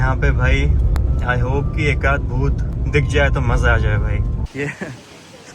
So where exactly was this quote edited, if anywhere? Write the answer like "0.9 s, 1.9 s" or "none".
1.0 s, 4.4 s